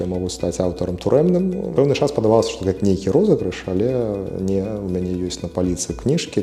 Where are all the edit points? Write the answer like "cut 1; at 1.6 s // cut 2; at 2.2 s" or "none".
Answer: cut 1; at 1.6 s